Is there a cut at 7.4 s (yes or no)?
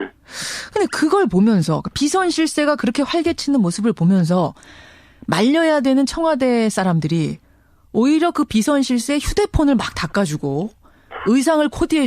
yes